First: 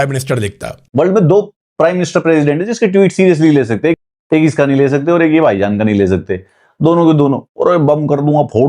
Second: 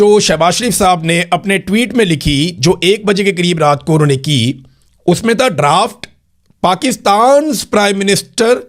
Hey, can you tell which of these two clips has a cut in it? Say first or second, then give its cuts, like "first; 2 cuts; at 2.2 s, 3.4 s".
first; 1 cut; at 0.9 s